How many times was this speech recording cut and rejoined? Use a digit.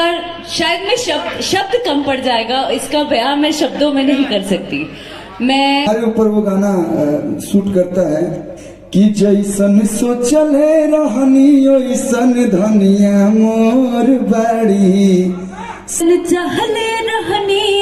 2